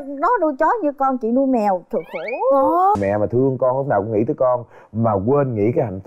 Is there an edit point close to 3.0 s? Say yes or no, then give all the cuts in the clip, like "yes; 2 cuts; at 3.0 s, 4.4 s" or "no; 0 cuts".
yes; 1 cut; at 3.0 s